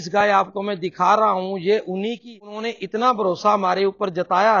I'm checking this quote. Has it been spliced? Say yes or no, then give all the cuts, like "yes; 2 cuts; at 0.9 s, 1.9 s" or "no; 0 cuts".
yes; 1 cut; at 2.3 s